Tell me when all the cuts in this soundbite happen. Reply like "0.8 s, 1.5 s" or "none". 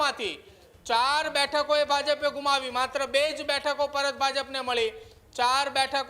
none